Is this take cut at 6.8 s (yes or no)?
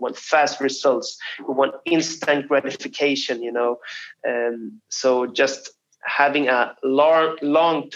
no